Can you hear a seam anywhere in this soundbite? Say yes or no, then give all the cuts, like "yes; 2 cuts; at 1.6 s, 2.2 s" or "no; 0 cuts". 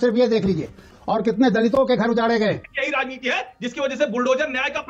yes; 2 cuts; at 0.9 s, 2.7 s